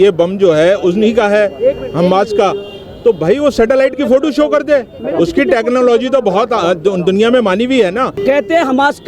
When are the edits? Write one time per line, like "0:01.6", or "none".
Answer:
0:08.2